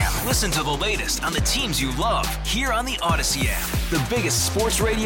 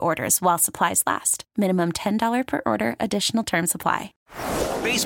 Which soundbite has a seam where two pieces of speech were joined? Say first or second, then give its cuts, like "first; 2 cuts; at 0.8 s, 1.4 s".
second; 1 cut; at 4.1 s